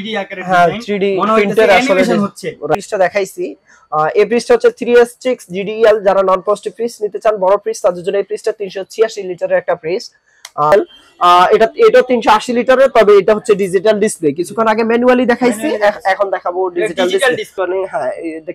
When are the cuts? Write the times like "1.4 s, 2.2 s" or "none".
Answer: 2.7 s, 10.7 s, 17.5 s